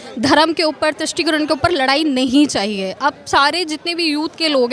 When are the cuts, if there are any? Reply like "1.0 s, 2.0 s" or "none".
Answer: none